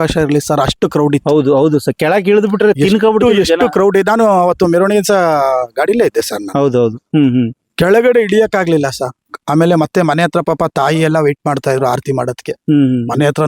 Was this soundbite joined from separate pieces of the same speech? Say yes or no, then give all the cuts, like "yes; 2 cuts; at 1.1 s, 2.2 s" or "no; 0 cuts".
no; 0 cuts